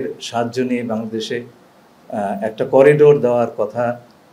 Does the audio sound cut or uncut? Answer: uncut